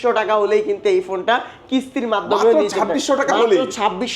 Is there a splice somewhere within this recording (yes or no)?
no